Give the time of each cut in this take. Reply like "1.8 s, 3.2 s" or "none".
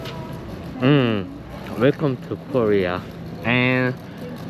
none